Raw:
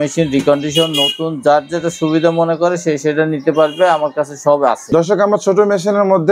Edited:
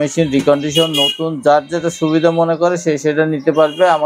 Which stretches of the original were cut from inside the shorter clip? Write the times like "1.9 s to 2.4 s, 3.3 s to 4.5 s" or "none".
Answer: none